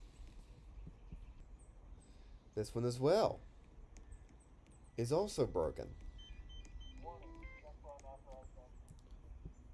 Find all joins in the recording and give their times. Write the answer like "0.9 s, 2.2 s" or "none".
1.4 s

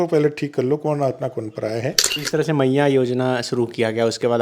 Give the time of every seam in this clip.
2.2 s

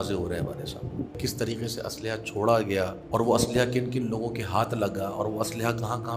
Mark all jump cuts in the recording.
1.2 s, 3.0 s

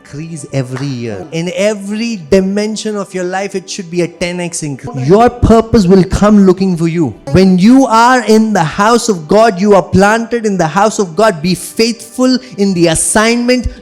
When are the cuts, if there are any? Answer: 1.2 s, 4.9 s, 7.2 s

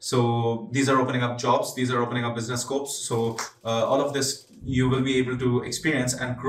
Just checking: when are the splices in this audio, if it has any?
none

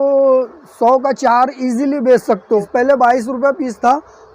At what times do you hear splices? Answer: 2.6 s

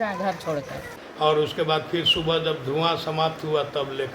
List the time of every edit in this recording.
1.0 s

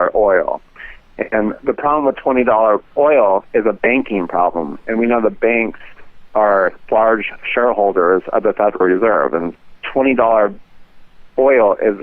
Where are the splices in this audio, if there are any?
9.5 s

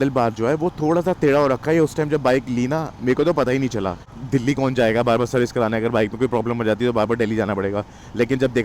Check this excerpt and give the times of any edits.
4.0 s

